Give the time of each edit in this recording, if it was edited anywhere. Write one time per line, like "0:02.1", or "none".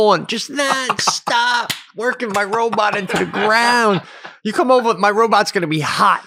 none